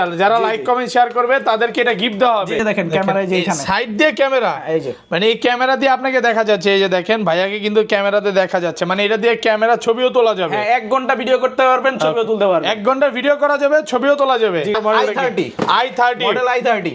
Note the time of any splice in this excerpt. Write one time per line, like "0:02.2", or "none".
0:02.6
0:14.8